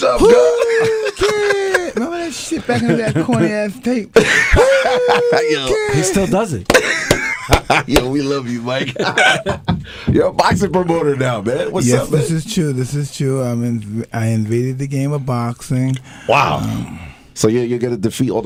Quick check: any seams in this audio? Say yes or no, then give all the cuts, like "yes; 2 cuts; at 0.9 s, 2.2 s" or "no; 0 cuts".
no; 0 cuts